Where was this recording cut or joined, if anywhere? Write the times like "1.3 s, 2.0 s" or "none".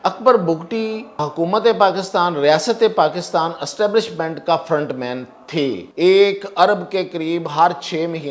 1.2 s, 5.9 s